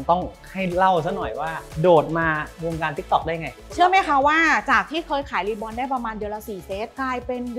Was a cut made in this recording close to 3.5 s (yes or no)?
yes